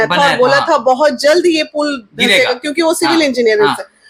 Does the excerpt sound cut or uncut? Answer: uncut